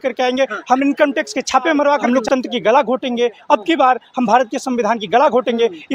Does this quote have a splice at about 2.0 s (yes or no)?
yes